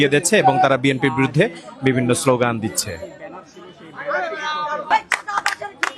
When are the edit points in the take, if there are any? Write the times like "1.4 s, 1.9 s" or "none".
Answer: 4.9 s